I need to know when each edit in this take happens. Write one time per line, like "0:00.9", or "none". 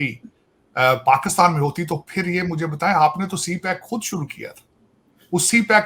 none